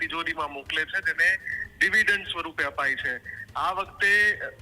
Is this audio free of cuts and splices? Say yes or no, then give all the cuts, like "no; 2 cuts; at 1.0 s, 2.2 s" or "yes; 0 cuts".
yes; 0 cuts